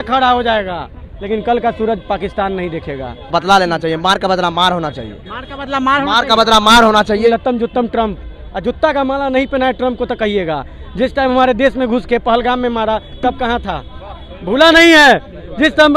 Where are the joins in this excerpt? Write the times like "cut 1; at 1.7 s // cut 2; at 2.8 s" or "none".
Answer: cut 1; at 1.1 s // cut 2; at 3.3 s // cut 3; at 7.3 s